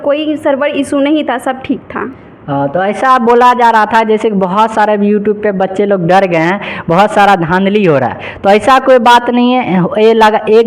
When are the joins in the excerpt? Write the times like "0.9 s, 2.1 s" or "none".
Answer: none